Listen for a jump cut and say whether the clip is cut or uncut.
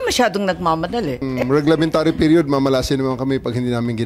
cut